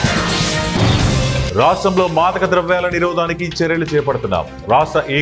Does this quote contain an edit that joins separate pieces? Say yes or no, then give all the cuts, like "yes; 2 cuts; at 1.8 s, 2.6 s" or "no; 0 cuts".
yes; 1 cut; at 1.4 s